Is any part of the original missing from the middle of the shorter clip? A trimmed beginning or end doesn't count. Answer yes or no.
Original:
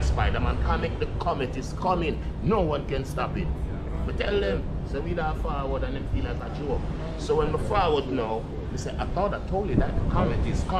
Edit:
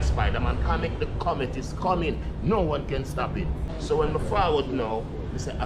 yes